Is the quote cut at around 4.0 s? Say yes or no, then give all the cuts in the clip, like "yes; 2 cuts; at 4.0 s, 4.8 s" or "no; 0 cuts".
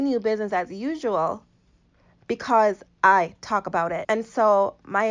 yes; 1 cut; at 4.0 s